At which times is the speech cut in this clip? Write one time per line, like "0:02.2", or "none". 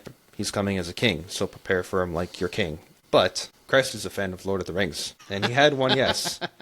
0:02.9
0:03.5
0:05.5